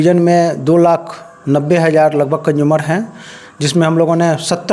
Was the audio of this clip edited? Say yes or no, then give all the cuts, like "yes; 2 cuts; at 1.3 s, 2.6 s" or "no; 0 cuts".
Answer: no; 0 cuts